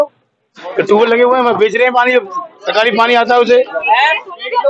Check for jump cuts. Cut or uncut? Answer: uncut